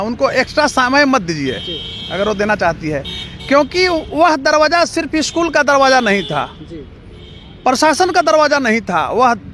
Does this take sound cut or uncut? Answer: uncut